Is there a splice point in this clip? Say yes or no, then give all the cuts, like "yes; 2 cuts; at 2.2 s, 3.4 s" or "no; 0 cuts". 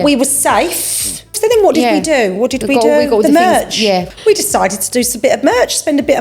yes; 2 cuts; at 1.2 s, 4.1 s